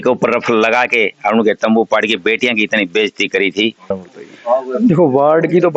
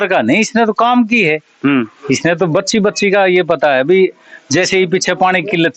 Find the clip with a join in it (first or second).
first